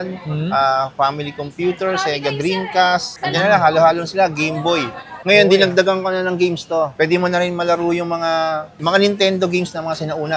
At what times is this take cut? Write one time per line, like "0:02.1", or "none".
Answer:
0:05.2